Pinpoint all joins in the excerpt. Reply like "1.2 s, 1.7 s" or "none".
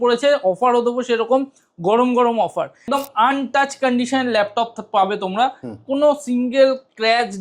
2.9 s